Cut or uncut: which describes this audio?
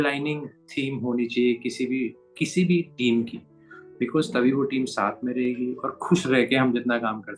uncut